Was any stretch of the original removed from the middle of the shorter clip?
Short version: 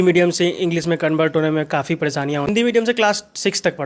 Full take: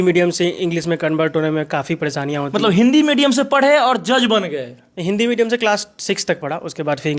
yes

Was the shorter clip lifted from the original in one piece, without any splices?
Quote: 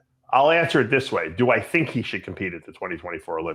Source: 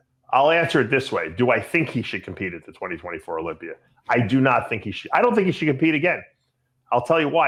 yes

